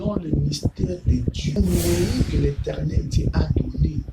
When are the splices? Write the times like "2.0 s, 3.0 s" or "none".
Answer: 1.5 s